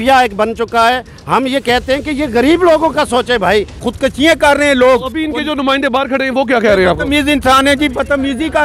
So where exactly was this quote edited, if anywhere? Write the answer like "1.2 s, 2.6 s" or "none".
3.8 s